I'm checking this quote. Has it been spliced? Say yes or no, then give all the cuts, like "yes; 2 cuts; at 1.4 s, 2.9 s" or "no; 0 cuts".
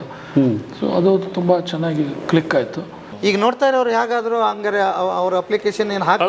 yes; 1 cut; at 3.0 s